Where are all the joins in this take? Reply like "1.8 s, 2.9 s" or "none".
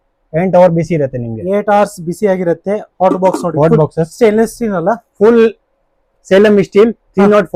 none